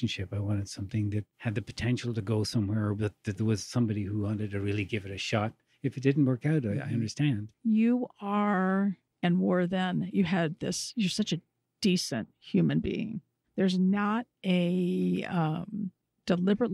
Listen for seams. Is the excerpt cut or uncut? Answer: cut